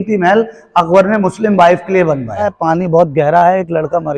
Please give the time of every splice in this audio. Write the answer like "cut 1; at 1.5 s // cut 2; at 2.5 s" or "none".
cut 1; at 2.5 s